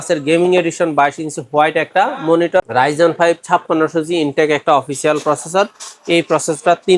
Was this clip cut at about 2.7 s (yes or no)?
yes